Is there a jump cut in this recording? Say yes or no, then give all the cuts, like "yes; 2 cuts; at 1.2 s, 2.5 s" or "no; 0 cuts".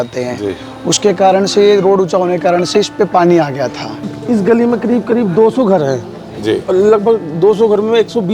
yes; 1 cut; at 4.1 s